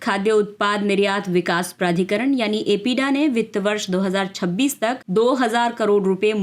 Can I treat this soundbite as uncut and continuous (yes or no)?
yes